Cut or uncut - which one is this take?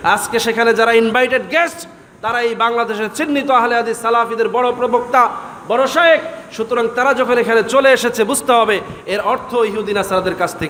uncut